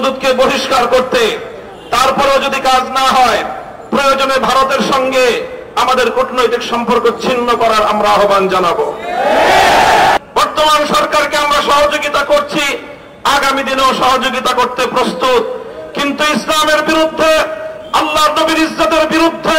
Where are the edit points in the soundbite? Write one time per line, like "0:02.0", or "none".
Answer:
0:10.2